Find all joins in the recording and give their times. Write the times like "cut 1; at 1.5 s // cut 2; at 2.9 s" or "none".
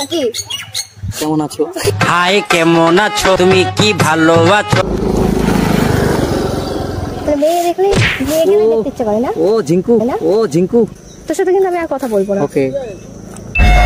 cut 1; at 4.8 s // cut 2; at 11.1 s